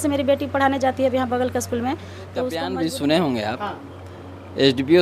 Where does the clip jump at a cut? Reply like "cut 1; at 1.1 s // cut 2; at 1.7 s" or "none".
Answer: cut 1; at 2.7 s